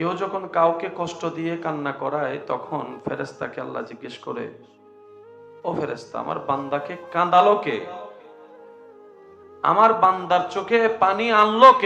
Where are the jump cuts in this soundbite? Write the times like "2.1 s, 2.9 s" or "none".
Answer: none